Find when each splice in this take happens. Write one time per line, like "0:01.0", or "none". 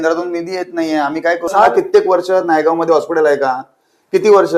0:01.5